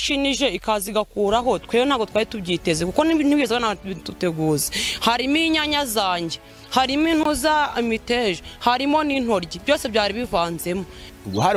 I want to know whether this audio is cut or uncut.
uncut